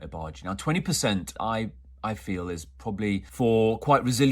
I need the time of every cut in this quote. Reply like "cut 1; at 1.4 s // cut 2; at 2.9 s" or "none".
cut 1; at 1.3 s // cut 2; at 3.3 s

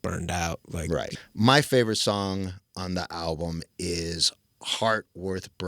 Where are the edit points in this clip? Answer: cut 1; at 1.1 s

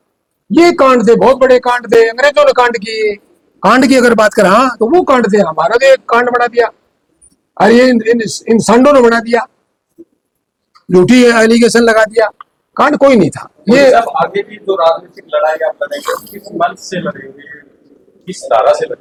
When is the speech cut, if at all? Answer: none

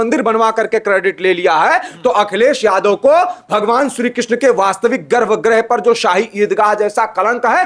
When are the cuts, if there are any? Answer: none

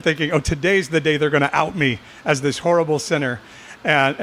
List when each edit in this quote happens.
none

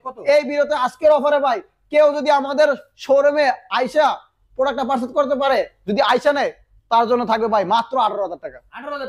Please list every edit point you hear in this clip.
none

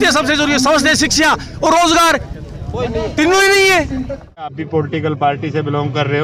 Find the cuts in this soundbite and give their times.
cut 1; at 4.5 s

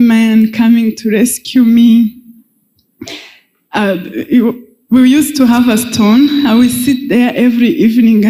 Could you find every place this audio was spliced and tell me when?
none

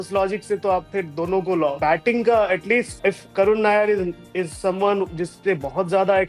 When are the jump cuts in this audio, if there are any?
cut 1; at 1.8 s // cut 2; at 2.9 s

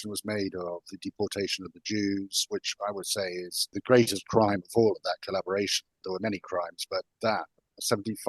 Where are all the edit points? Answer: cut 1; at 3.7 s // cut 2; at 6.0 s

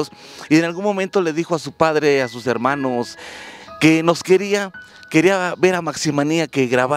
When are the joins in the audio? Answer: cut 1; at 3.3 s

